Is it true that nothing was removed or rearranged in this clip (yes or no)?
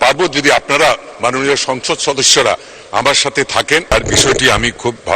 yes